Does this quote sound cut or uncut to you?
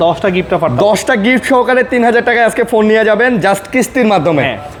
uncut